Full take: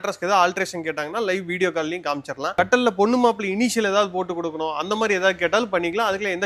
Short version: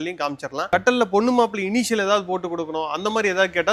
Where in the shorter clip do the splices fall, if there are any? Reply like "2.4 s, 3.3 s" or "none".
none